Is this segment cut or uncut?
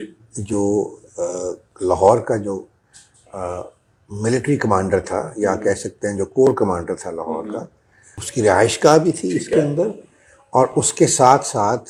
uncut